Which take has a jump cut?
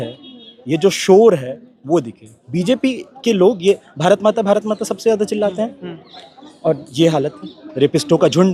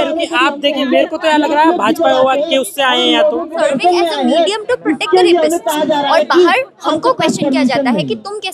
second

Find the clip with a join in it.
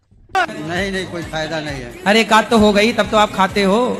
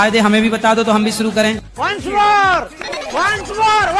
second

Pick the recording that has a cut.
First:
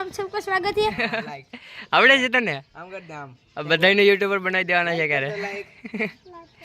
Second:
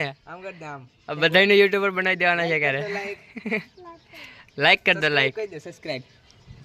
first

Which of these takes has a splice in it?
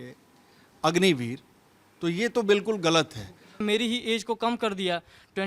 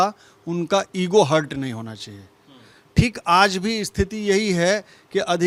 first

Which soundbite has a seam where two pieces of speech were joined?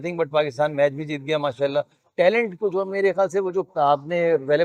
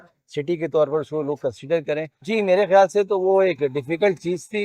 second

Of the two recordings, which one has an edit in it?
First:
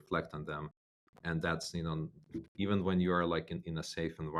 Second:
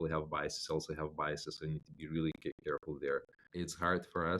second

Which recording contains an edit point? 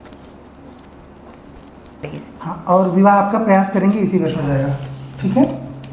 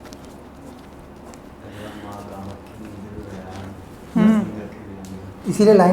second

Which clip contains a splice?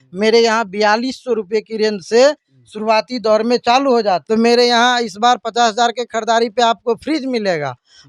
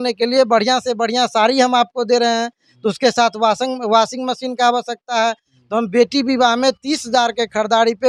first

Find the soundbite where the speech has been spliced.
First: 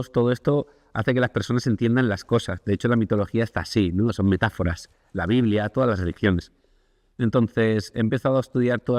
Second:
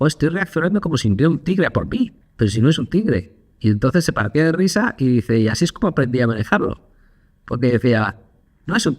second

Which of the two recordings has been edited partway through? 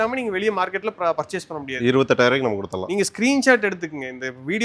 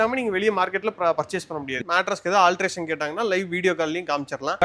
second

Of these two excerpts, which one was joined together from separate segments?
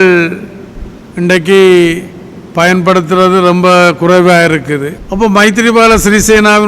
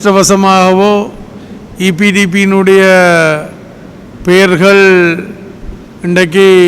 first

